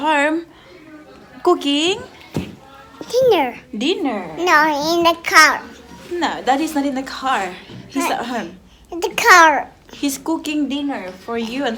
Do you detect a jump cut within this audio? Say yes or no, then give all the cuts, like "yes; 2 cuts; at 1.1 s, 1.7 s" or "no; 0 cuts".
no; 0 cuts